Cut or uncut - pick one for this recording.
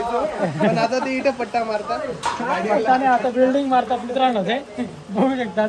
uncut